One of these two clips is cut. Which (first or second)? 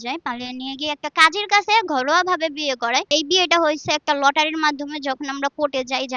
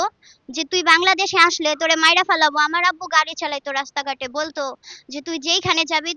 first